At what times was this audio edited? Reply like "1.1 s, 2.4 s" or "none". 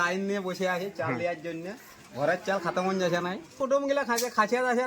3.5 s